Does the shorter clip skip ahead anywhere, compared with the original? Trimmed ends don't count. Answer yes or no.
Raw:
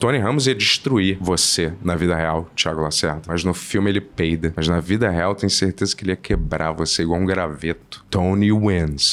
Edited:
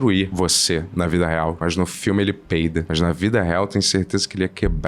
yes